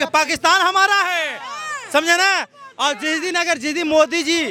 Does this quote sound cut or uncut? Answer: uncut